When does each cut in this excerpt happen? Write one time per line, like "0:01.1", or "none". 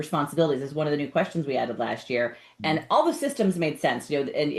none

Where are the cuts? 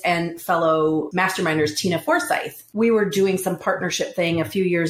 0:01.1
0:02.6

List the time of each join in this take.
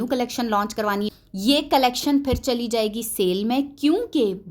0:01.1

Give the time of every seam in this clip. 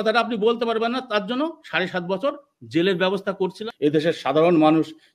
0:03.6

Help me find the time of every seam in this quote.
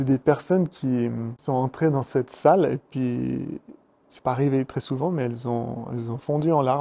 0:01.4

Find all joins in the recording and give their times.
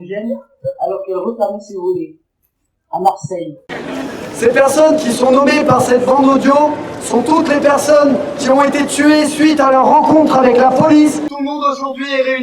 0:11.3

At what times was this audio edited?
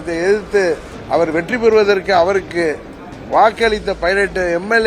0:00.9

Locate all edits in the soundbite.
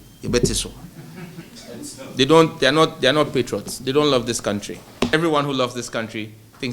0:01.5
0:05.1

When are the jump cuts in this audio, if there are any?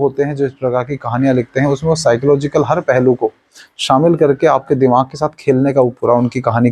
none

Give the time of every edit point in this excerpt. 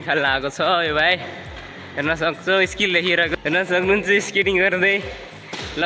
0:03.3

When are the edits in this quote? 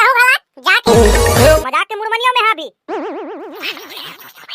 0:01.6

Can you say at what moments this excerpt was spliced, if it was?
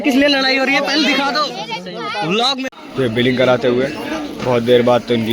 0:02.7

